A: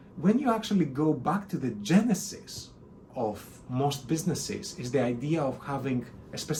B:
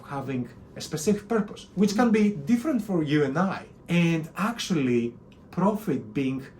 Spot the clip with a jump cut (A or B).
B